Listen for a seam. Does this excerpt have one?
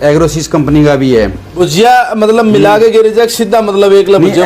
yes; 1 cut; at 1.5 s

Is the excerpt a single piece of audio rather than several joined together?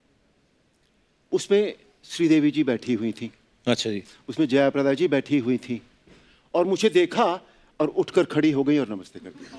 yes; 0 cuts

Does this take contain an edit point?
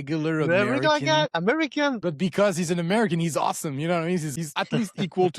yes; 2 cuts; at 2.0 s, 4.5 s

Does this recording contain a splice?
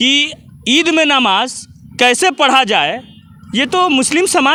no; 0 cuts

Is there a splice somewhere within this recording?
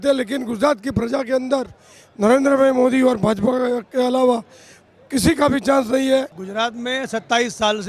yes; 1 cut; at 6.4 s

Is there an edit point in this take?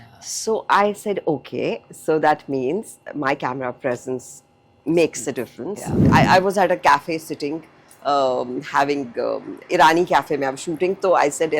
yes; 1 cut; at 6.0 s

